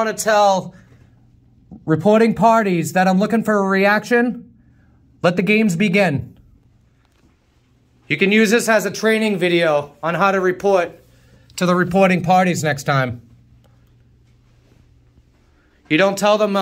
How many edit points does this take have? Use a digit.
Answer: 0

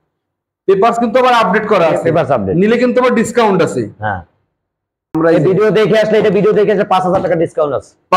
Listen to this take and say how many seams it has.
1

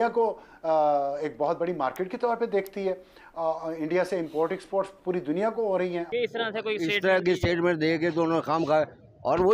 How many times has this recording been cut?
1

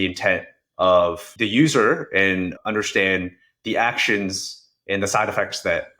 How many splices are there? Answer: 2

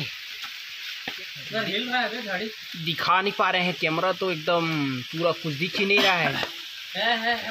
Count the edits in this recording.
1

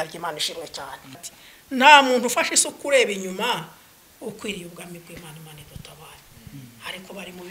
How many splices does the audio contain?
1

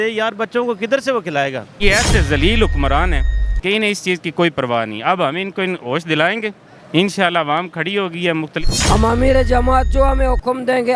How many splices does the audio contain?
2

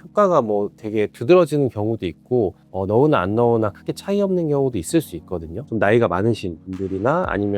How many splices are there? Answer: 1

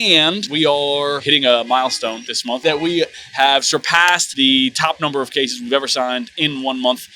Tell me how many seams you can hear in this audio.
1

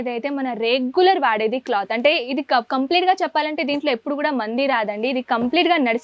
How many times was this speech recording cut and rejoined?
0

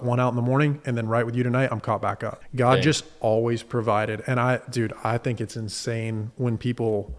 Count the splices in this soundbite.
1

